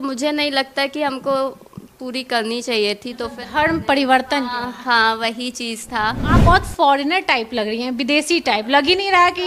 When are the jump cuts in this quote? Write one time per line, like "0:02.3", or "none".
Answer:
0:06.2